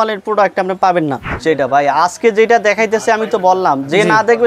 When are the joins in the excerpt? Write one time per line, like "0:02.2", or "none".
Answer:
0:01.3